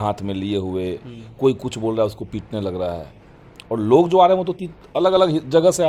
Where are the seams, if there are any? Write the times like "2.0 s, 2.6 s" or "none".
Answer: none